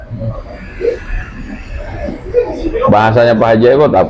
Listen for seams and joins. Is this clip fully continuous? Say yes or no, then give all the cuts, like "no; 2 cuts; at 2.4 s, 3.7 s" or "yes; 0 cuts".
yes; 0 cuts